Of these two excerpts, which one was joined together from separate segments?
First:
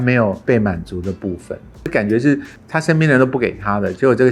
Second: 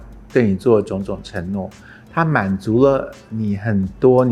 first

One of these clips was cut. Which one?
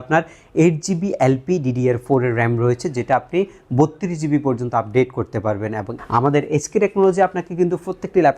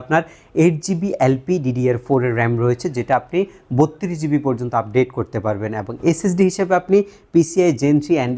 first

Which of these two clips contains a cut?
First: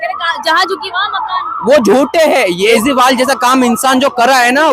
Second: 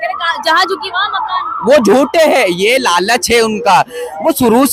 first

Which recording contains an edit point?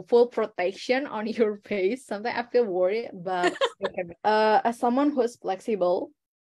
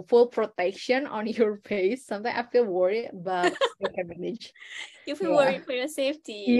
first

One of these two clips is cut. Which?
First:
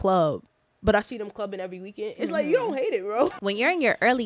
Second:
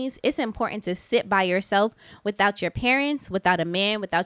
first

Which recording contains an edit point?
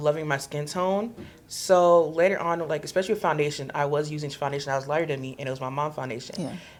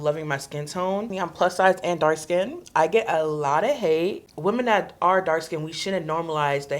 second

